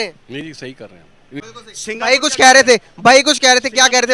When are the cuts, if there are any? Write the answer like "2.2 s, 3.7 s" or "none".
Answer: 1.4 s

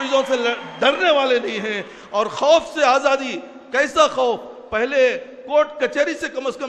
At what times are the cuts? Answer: none

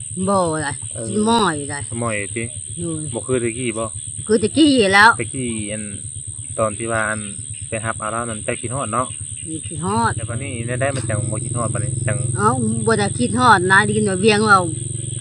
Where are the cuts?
10.5 s

